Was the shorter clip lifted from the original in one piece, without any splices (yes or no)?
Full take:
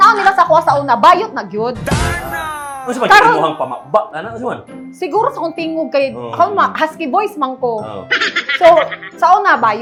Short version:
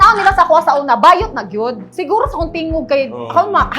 no